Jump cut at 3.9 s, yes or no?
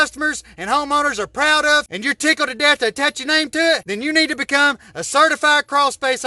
yes